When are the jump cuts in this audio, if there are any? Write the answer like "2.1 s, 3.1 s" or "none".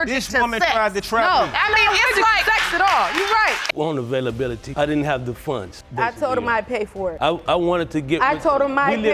3.6 s